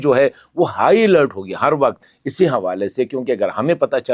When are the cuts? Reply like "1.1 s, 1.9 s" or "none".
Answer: none